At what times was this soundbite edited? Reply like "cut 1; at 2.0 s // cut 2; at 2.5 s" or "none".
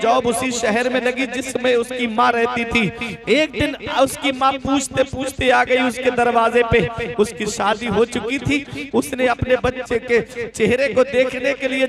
none